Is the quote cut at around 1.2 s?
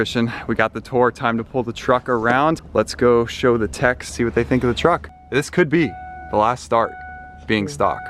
no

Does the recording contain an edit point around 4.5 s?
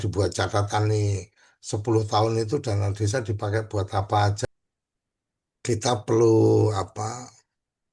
yes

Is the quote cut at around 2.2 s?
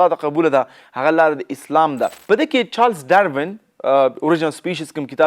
yes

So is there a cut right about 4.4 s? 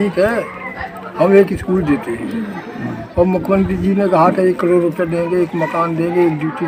no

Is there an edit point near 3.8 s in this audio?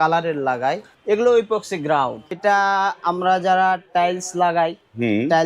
no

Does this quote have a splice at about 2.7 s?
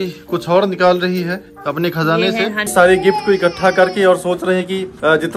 yes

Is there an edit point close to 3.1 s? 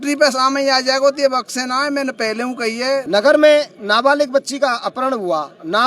yes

